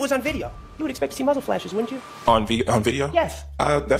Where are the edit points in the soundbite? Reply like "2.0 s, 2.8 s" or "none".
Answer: none